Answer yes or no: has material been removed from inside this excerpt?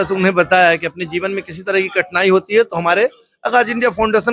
no